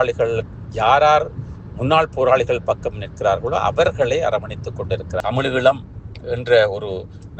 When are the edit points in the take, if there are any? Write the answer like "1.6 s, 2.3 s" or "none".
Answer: 5.2 s